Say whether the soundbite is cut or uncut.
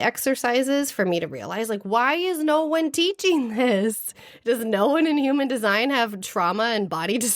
uncut